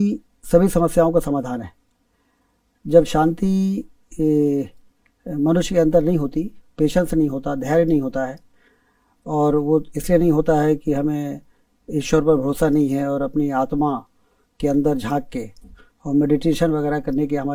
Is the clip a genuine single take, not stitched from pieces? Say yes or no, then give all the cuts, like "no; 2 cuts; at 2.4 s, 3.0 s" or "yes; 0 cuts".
yes; 0 cuts